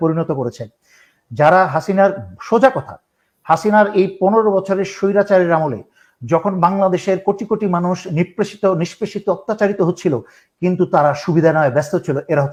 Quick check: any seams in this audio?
no; 0 cuts

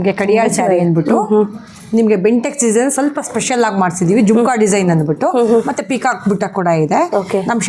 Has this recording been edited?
no; 0 cuts

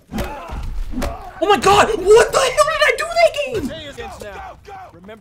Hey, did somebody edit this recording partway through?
yes; 1 cut; at 3.9 s

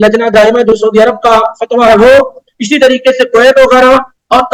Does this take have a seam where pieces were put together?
no; 0 cuts

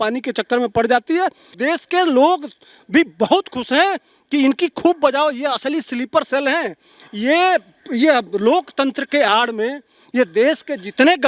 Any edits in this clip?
yes; 1 cut; at 1.5 s

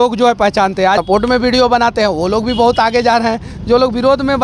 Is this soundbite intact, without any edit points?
no; 1 cut; at 1.0 s

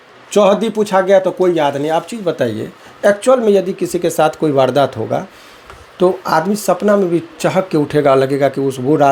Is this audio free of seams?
yes; 0 cuts

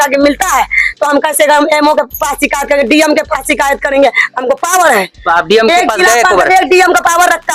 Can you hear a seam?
no; 0 cuts

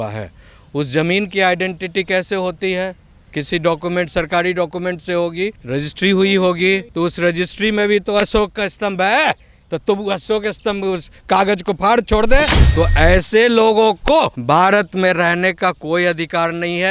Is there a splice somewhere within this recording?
yes; 4 cuts; at 5.6 s, 6.9 s, 12.6 s, 14.4 s

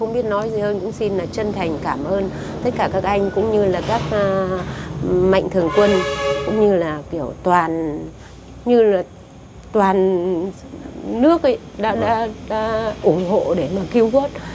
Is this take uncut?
yes; 0 cuts

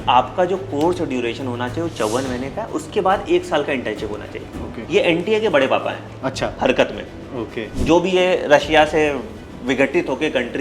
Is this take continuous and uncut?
no; 2 cuts; at 4.8 s, 7.6 s

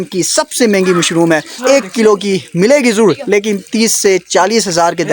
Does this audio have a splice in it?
yes; 1 cut; at 1.6 s

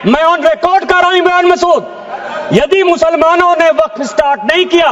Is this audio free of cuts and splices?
yes; 0 cuts

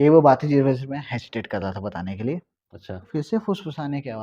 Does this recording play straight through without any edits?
no; 1 cut; at 3.1 s

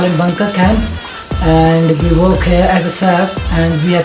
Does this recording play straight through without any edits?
yes; 0 cuts

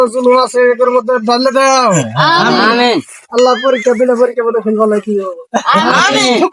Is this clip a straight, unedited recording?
yes; 0 cuts

